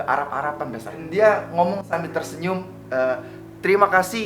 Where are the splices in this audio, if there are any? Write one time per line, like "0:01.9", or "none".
0:01.0

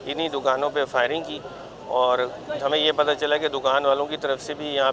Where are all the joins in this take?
none

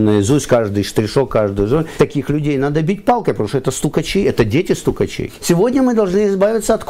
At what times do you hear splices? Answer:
0:01.9
0:05.3

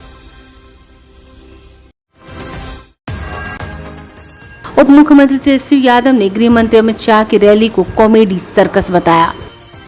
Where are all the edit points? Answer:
0:01.1

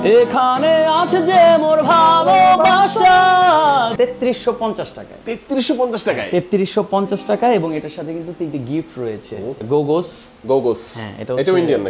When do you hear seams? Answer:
0:03.9
0:09.6

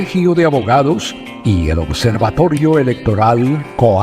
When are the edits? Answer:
none

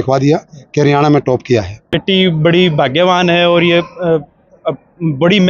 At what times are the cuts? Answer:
0:01.8

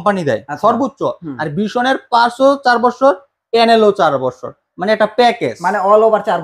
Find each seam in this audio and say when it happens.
none

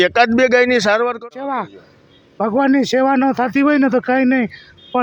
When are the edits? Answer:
0:01.4

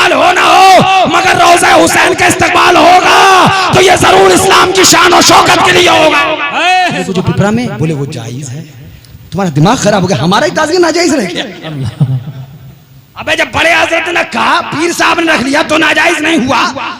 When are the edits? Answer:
0:07.0

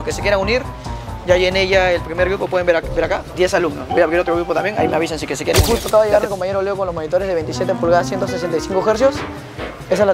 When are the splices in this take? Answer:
0:03.3
0:05.6

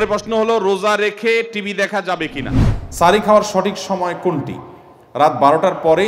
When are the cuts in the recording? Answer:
0:02.7

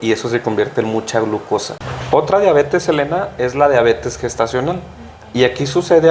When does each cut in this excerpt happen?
0:02.0

